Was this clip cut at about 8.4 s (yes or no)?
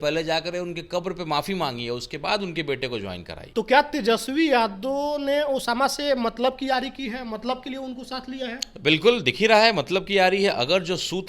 no